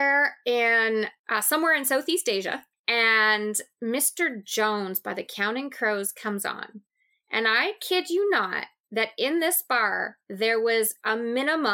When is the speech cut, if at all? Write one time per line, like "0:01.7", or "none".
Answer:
0:02.7

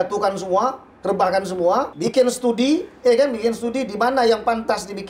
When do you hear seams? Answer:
0:01.9

